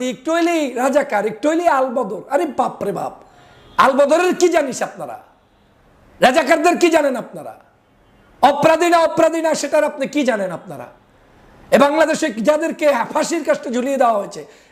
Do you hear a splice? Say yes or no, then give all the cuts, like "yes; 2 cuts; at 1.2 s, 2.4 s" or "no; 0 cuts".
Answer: no; 0 cuts